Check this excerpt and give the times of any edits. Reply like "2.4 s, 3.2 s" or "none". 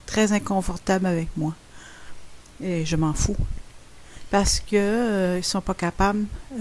2.9 s